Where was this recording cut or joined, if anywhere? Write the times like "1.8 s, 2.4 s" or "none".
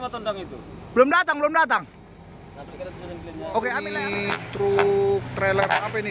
4.0 s